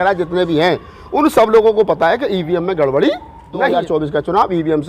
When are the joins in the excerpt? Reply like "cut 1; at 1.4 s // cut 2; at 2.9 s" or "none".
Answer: cut 1; at 3.7 s